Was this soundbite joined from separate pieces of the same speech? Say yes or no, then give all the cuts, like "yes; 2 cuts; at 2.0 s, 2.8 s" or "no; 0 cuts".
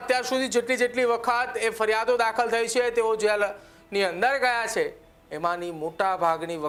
no; 0 cuts